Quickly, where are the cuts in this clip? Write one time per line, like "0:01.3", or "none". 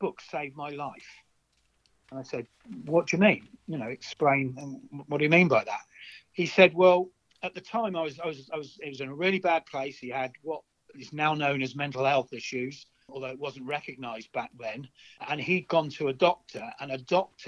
0:13.1
0:15.2